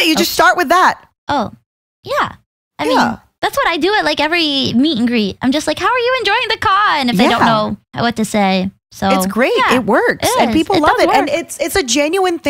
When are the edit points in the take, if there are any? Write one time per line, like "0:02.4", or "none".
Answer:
0:01.1
0:03.3
0:07.8